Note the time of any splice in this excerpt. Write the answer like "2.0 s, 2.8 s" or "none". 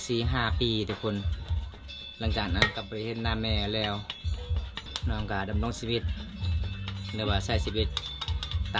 4.9 s